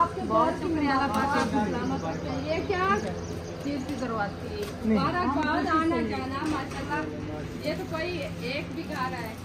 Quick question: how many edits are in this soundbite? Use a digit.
0